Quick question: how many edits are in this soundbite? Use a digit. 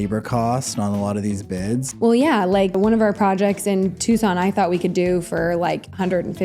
2